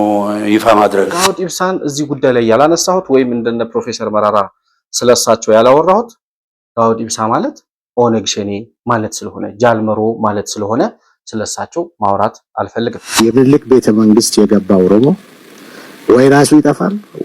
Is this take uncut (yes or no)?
no